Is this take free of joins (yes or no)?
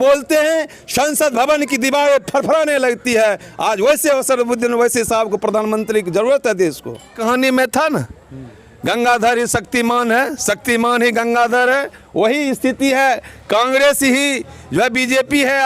no